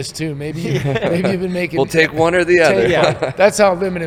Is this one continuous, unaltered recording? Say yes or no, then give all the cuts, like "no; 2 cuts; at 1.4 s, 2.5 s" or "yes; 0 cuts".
yes; 0 cuts